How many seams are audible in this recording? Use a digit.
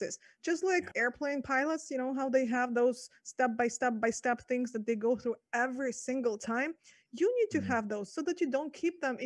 1